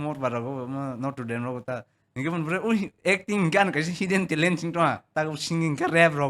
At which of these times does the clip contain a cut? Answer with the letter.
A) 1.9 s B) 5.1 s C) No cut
B